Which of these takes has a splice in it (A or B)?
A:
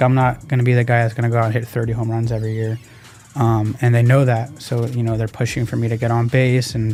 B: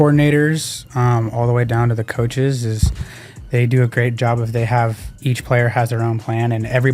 B